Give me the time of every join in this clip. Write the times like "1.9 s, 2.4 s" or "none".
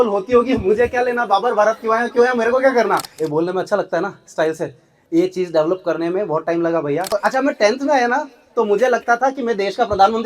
3.1 s, 7.1 s